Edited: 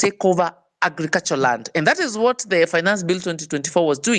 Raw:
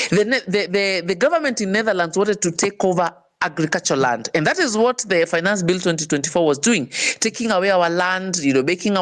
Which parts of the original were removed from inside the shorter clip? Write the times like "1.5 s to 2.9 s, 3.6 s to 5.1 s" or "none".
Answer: none

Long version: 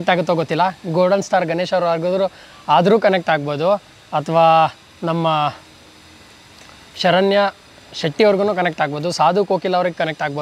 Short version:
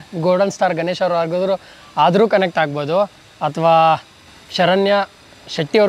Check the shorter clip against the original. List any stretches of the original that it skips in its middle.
4.9 s to 6.6 s

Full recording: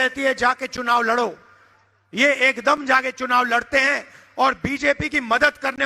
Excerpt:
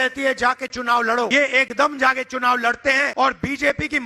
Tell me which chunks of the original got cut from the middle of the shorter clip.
1.3 s to 2.2 s, 4.0 s to 4.3 s

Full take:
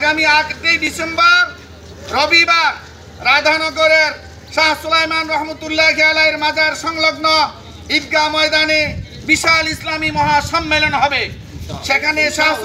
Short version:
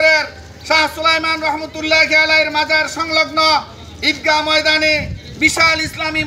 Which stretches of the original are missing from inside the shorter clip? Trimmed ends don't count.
none

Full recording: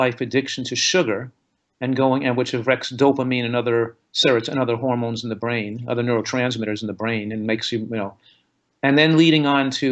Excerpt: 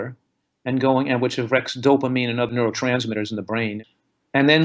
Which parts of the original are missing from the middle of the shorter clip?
3.6 s to 6.0 s, 7.3 s to 8.3 s

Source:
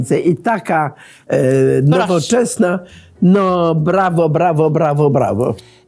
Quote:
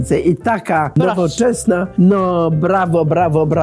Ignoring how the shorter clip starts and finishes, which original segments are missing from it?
0.9 s to 1.9 s, 2.8 s to 3.1 s

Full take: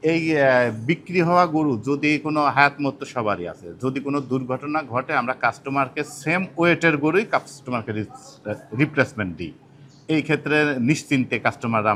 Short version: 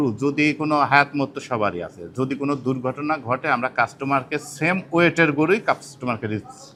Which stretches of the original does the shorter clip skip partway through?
none

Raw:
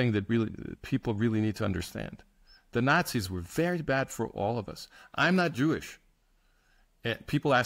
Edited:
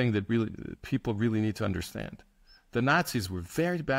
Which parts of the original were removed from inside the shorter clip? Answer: none

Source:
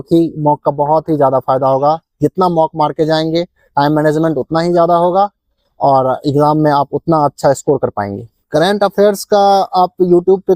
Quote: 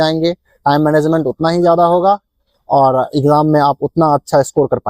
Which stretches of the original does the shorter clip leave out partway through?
none

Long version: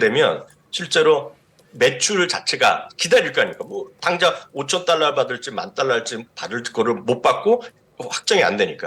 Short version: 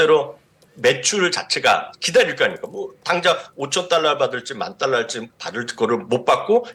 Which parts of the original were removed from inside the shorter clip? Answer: none

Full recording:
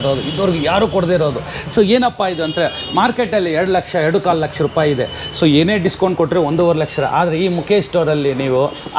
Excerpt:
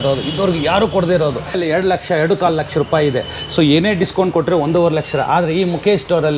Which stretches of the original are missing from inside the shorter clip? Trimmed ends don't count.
1.6 s to 3.4 s

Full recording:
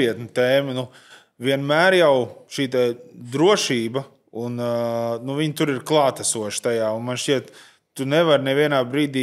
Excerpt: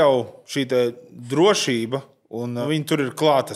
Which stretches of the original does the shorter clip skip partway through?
4.6 s to 5.3 s

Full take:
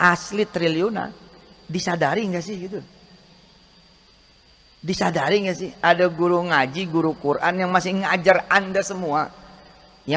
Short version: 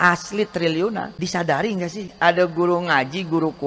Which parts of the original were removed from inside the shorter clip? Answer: 1.1 s to 1.7 s, 2.6 s to 5.7 s

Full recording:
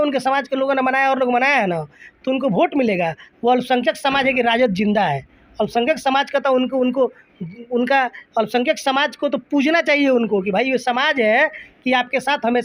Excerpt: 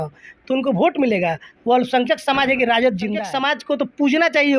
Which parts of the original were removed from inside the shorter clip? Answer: 5.0 s to 8.7 s

